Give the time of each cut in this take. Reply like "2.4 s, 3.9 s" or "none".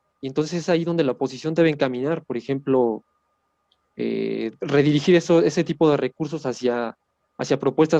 none